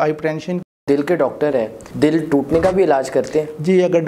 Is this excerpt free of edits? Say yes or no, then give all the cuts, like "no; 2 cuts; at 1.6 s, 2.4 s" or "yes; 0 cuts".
no; 2 cuts; at 0.8 s, 1.8 s